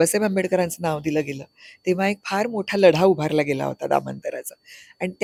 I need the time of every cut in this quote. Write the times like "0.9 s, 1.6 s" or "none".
none